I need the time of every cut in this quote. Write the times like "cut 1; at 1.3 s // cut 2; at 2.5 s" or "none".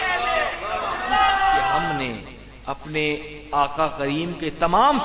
cut 1; at 1.9 s